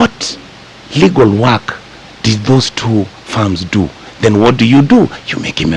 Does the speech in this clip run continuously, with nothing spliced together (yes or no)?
yes